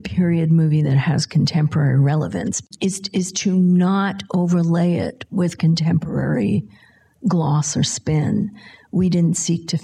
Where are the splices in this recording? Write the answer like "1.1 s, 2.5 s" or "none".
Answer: 2.7 s

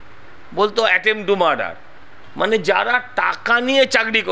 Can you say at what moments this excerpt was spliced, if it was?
2.2 s

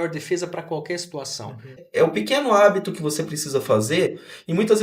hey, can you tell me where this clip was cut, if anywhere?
1.8 s

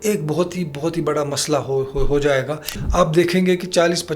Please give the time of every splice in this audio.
2.8 s

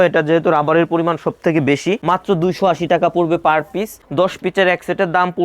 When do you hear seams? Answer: 2.0 s

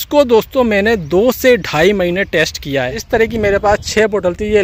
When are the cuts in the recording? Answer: 3.0 s

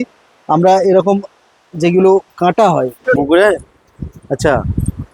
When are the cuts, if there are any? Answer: 3.2 s

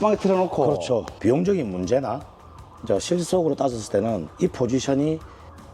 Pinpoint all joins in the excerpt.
1.2 s

